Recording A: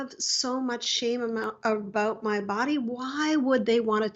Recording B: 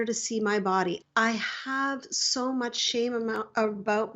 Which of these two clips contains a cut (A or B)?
B